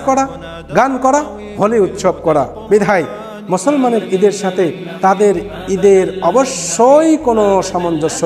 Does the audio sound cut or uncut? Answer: uncut